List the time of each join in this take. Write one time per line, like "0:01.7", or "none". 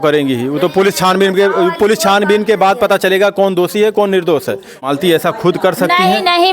0:04.8